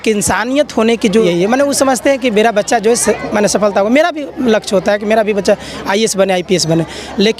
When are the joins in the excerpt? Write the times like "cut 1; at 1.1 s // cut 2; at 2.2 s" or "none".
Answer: cut 1; at 1.2 s